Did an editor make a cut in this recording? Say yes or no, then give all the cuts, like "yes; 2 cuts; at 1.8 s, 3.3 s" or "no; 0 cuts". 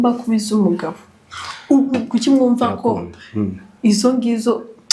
yes; 1 cut; at 1.9 s